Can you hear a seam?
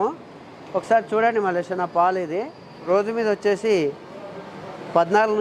yes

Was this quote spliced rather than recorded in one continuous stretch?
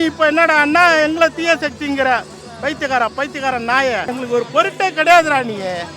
yes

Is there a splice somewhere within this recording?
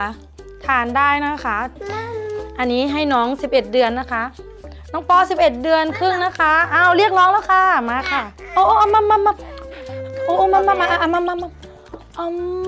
yes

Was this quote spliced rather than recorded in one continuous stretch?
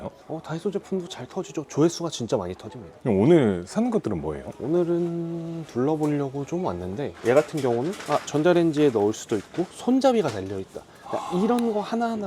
yes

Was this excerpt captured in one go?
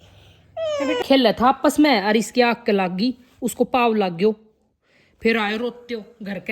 no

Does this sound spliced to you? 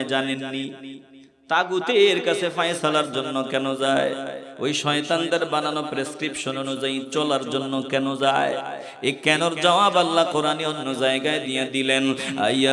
no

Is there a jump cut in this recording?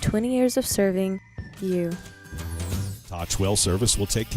yes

